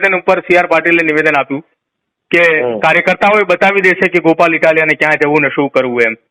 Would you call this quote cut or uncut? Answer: uncut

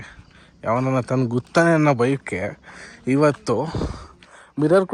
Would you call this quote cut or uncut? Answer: uncut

